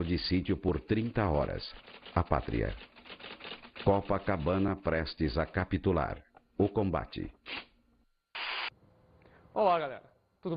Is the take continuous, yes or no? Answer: yes